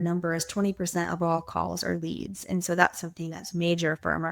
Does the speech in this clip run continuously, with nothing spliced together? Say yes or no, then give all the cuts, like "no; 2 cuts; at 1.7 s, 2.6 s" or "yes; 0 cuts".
yes; 0 cuts